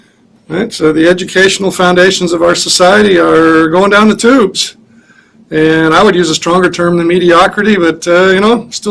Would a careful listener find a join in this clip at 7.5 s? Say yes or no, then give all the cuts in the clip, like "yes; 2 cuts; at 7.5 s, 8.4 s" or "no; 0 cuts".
yes; 1 cut; at 7.5 s